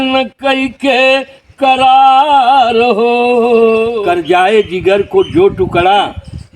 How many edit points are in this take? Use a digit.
1